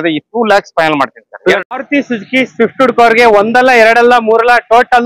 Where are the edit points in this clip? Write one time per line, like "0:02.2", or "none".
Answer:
0:01.6